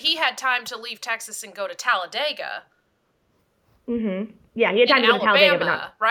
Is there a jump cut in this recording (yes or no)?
no